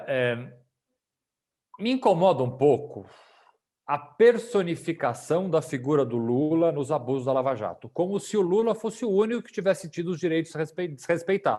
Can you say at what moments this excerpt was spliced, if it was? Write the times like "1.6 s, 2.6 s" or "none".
none

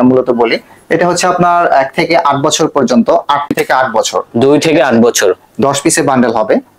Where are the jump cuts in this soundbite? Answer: 3.5 s

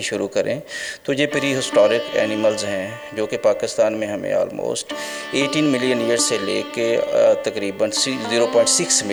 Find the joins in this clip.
none

